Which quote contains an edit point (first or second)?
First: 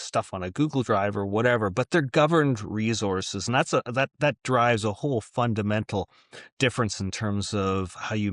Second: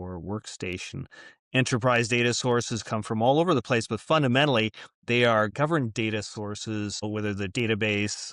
second